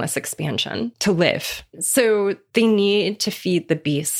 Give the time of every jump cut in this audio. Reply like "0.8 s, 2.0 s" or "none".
1.0 s, 1.8 s